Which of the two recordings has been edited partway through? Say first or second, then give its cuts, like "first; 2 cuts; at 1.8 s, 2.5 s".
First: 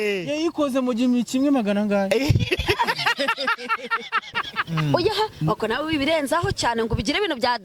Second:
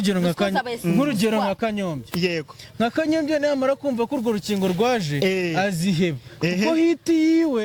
first; 1 cut; at 4.6 s